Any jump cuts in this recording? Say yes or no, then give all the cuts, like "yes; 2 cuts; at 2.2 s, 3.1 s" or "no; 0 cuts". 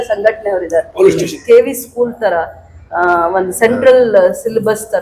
yes; 1 cut; at 1.3 s